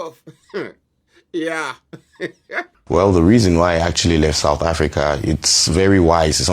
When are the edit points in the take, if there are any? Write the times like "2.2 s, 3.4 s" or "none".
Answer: 2.7 s